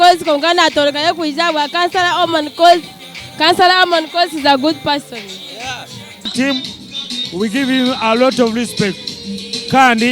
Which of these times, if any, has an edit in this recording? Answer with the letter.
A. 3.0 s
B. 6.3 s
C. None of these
B